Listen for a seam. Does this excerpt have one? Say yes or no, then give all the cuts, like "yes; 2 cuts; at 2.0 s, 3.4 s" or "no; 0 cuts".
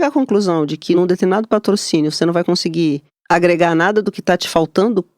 yes; 2 cuts; at 0.9 s, 3.1 s